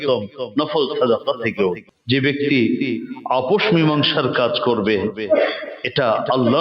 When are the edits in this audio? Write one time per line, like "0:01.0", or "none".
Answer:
0:01.9